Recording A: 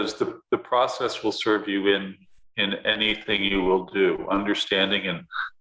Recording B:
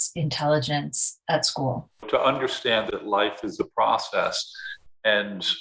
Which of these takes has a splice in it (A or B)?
B